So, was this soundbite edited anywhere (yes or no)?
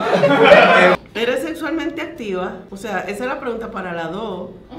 yes